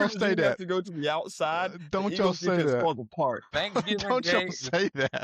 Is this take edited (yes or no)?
yes